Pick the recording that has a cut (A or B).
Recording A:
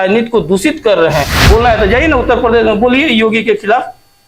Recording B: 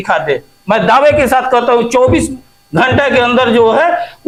A